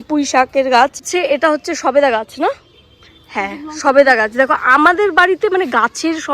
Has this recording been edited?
yes; 1 cut; at 1.1 s

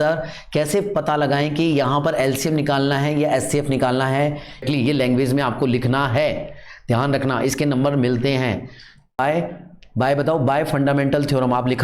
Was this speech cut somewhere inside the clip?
yes; 2 cuts; at 4.6 s, 9.2 s

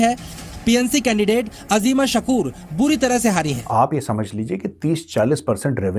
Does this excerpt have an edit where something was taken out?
yes; 1 cut; at 3.6 s

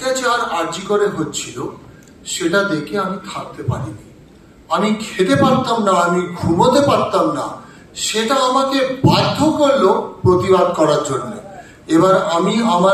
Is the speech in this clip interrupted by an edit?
no; 0 cuts

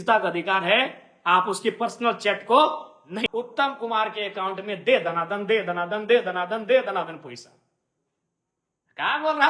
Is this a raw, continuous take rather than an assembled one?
no; 1 cut; at 3.3 s

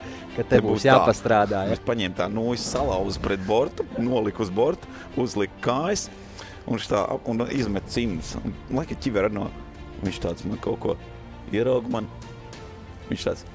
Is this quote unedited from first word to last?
no; 1 cut; at 1.7 s

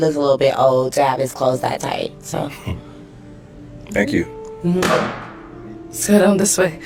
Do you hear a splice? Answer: no; 0 cuts

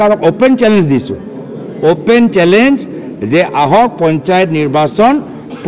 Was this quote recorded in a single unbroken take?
yes; 0 cuts

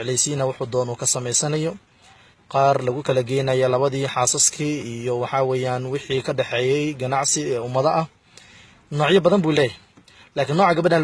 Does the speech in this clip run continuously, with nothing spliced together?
no; 1 cut; at 1.4 s

